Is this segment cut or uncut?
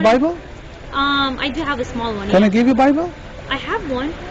uncut